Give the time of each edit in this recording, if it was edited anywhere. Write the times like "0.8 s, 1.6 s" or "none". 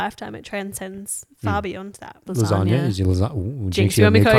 2.3 s